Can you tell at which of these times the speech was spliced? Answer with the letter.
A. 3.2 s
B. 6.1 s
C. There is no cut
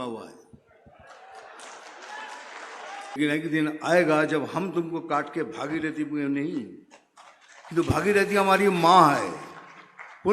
A